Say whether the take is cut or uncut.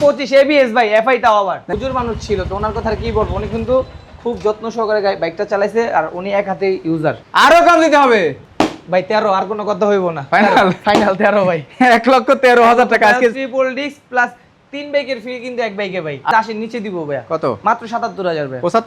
cut